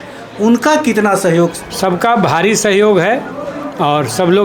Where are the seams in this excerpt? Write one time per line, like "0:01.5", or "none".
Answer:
0:01.6